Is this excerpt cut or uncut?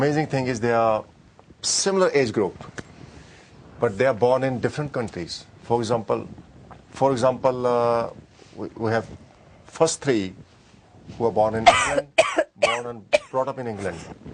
uncut